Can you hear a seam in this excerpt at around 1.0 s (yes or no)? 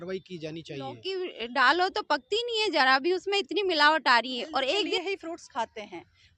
yes